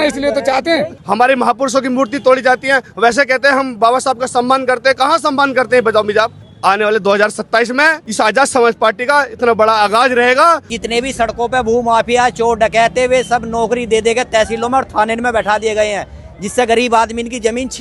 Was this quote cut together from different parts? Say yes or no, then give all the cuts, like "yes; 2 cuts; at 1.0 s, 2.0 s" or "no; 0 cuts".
yes; 4 cuts; at 1.0 s, 6.4 s, 8.0 s, 10.7 s